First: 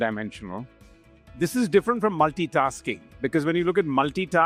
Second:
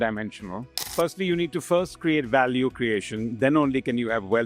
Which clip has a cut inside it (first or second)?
second